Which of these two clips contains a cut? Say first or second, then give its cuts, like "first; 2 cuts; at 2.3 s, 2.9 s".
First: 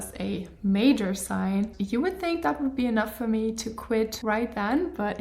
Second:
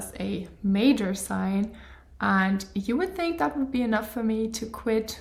first; 2 cuts; at 1.8 s, 4.2 s